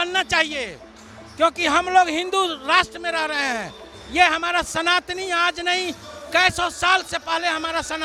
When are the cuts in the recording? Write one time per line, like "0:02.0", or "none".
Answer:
none